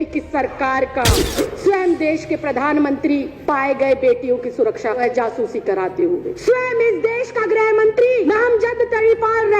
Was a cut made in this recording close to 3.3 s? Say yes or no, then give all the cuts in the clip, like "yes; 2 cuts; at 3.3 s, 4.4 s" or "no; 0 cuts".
yes; 5 cuts; at 1.1 s, 3.3 s, 5.0 s, 6.3 s, 8.3 s